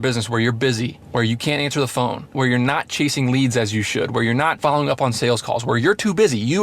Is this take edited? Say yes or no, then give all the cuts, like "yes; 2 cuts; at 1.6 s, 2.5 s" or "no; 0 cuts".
yes; 3 cuts; at 1.0 s, 2.3 s, 4.6 s